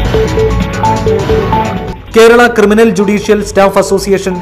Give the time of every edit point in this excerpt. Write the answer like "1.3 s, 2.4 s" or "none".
none

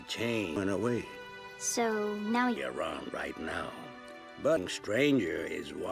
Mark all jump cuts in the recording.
none

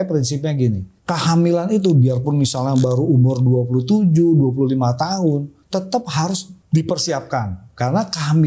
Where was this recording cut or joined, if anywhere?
0.9 s, 5.6 s, 6.5 s

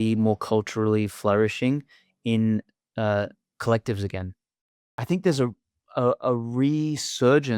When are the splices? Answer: 4.6 s

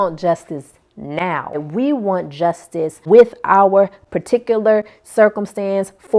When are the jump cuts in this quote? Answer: 1.6 s, 3.0 s

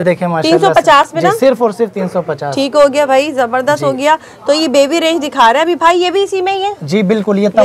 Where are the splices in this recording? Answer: none

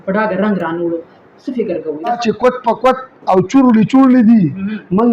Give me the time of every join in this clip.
2.2 s

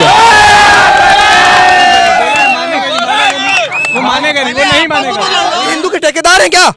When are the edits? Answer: 5.7 s

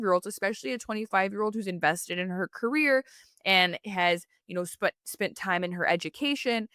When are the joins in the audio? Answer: none

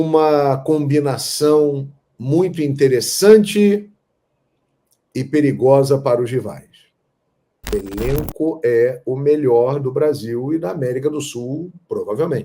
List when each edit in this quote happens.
7.7 s

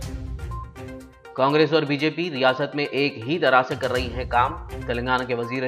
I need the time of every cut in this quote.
none

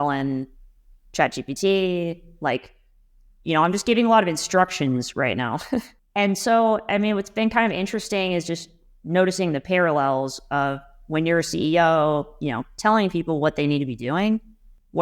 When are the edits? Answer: none

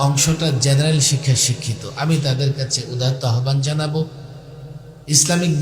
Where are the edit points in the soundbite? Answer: none

